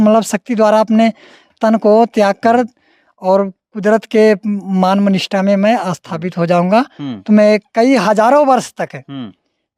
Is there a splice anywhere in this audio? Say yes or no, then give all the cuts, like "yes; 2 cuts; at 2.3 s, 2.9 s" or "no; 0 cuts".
no; 0 cuts